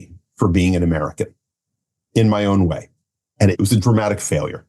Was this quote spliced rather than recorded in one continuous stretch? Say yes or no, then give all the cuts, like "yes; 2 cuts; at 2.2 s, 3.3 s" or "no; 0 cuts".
yes; 1 cut; at 3.2 s